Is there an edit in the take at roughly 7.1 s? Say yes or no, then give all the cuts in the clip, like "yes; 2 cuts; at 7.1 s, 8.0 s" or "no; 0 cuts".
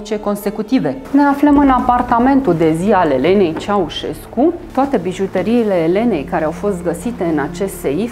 no; 2 cuts; at 1.0 s, 4.6 s